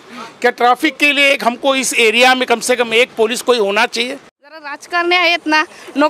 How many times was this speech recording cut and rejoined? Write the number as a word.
one